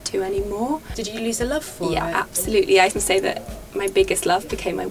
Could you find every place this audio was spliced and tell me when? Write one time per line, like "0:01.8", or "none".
0:00.9
0:02.9